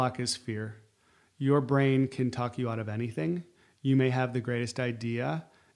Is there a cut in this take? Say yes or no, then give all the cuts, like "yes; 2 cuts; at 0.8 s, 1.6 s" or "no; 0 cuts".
no; 0 cuts